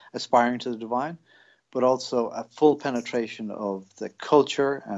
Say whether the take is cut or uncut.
uncut